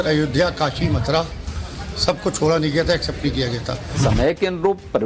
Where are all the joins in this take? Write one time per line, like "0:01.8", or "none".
0:04.0